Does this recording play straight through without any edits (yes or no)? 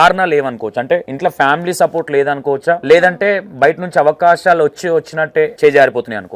no